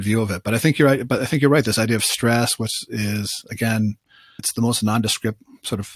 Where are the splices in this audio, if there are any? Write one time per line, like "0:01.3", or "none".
0:04.4